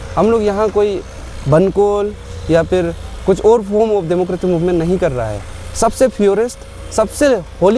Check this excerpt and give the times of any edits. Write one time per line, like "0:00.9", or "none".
none